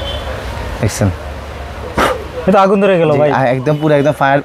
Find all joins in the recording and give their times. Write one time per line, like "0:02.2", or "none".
none